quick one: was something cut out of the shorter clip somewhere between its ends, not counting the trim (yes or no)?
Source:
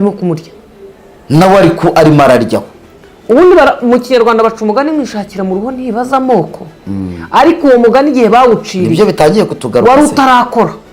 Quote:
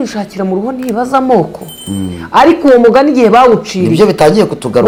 no